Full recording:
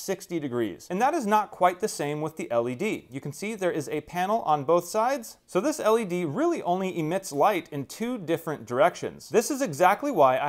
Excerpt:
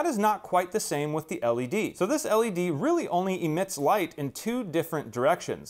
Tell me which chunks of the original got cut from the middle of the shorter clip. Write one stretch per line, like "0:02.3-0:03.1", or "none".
0:03.0-0:05.5